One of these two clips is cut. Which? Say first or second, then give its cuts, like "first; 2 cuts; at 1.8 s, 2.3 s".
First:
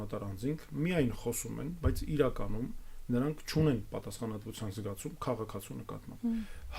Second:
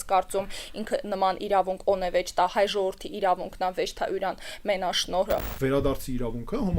second; 1 cut; at 5.5 s